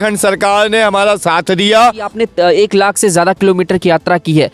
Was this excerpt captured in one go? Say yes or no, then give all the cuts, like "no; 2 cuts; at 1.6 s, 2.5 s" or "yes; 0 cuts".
no; 1 cut; at 2.1 s